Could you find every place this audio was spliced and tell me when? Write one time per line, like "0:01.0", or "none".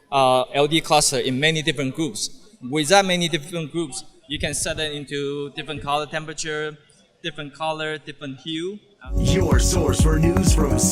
0:09.1